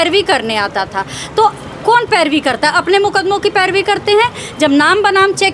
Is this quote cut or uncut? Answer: uncut